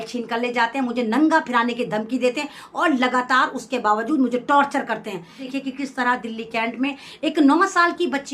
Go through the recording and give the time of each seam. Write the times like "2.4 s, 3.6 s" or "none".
5.4 s